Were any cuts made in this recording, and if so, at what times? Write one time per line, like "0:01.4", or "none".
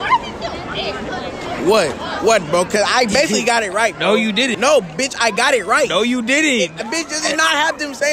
0:04.5